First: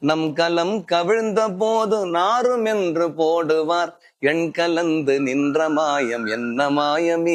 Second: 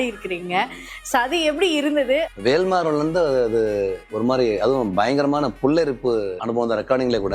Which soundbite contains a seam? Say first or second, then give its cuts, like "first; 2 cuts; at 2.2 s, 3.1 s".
second; 2 cuts; at 2.3 s, 6.4 s